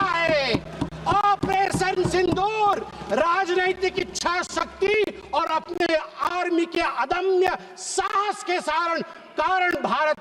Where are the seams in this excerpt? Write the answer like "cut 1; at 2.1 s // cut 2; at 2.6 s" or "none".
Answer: none